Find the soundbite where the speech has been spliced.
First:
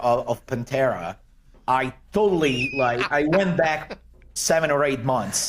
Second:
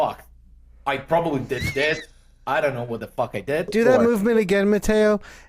second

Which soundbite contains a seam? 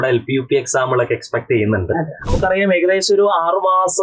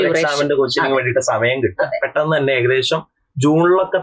first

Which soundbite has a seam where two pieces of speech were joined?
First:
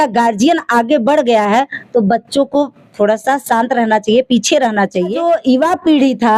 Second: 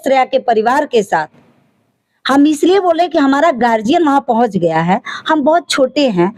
first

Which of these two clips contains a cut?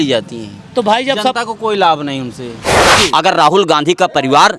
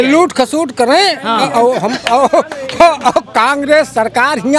first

